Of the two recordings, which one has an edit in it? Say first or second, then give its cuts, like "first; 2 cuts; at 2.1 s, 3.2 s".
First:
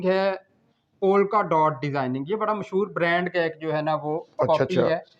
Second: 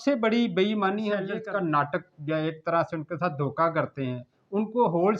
second; 1 cut; at 1.4 s